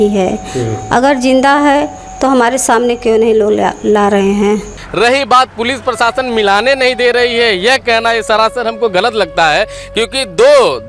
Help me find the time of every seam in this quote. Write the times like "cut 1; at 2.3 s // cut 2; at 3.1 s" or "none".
cut 1; at 4.8 s